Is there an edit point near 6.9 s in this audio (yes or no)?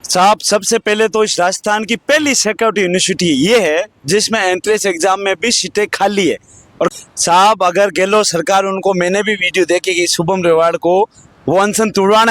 yes